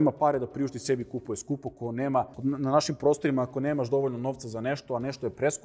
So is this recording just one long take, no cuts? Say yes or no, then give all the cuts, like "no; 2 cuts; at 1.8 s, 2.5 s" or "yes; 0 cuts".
no; 1 cut; at 2.3 s